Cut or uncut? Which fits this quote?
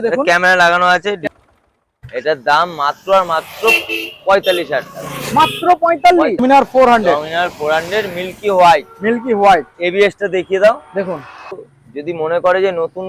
cut